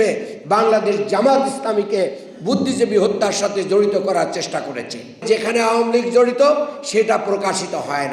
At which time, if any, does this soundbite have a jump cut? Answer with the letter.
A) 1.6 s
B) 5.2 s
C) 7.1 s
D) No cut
B